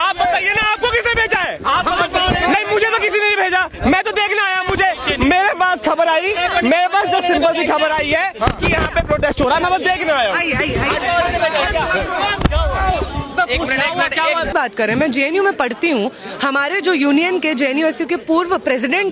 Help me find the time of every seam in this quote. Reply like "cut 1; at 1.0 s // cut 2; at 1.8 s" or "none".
cut 1; at 14.5 s